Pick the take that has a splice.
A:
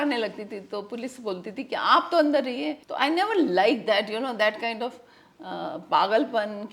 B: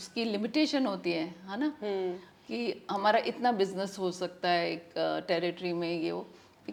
A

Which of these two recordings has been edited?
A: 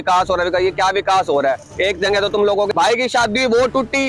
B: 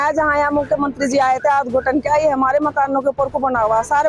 A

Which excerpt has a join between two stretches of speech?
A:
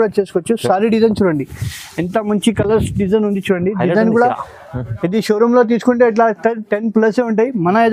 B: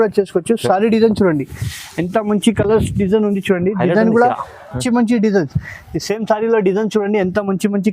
B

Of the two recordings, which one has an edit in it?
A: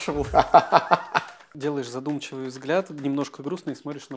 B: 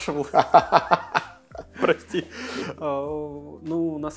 A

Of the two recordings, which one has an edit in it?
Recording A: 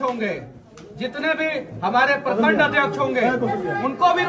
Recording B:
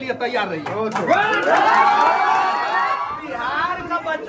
B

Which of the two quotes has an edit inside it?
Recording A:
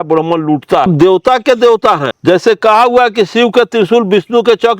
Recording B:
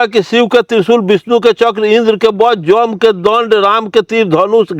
A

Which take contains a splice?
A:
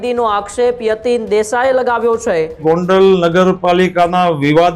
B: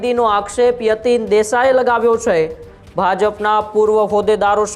A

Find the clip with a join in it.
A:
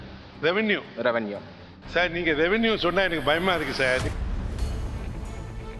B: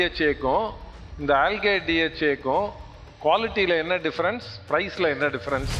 A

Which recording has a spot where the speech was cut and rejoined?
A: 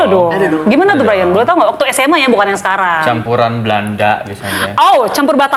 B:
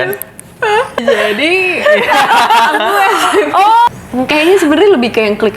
B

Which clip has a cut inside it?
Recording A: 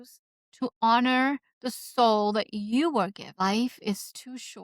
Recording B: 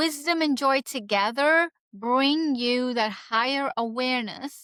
A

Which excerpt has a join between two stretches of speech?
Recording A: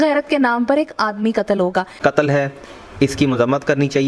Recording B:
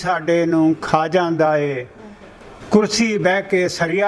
A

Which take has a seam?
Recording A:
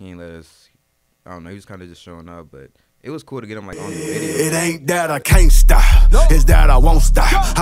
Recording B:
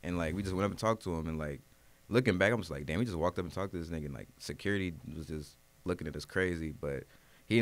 A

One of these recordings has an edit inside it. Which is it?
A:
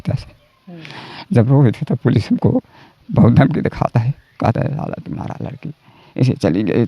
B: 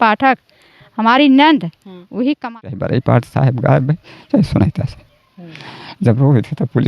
B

